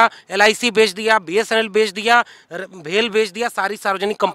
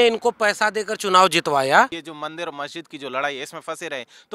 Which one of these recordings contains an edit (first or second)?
second